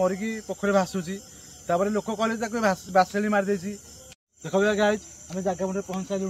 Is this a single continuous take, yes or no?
no